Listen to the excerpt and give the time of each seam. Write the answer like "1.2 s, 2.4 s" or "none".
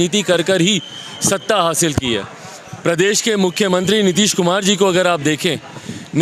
none